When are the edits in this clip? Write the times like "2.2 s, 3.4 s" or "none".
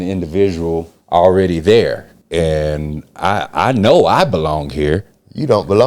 0.9 s, 2.1 s